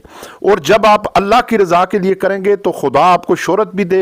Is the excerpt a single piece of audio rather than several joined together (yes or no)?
yes